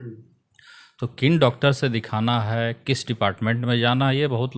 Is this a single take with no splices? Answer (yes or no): yes